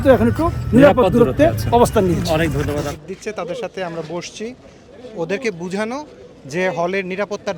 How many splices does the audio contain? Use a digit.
1